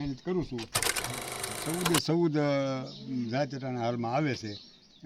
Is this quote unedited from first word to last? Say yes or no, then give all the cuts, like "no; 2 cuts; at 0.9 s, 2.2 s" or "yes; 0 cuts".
no; 1 cut; at 1.1 s